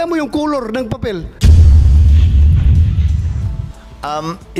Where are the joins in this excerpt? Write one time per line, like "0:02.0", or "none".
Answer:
0:01.3
0:03.5